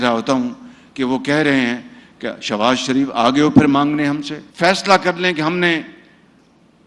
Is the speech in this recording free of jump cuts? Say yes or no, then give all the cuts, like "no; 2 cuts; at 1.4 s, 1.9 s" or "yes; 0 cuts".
no; 1 cut; at 4.4 s